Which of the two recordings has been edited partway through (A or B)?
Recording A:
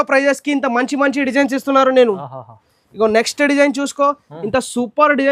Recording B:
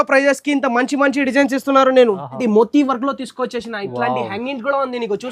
B